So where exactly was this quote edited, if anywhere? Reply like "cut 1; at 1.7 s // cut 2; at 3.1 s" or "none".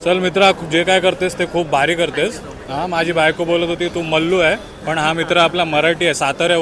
none